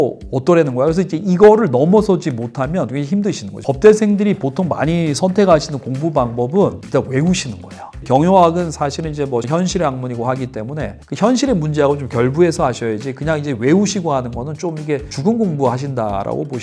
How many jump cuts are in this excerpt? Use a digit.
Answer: 3